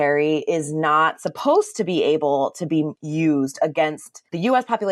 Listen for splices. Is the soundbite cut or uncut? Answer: uncut